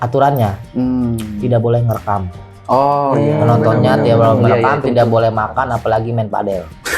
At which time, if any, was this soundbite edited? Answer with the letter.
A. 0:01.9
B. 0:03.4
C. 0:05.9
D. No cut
D